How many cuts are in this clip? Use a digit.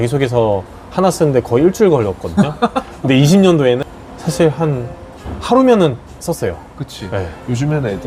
0